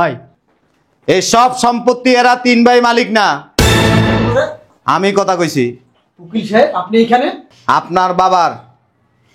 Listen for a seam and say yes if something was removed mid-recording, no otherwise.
yes